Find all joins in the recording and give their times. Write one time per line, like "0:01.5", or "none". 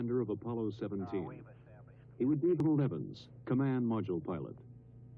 0:02.6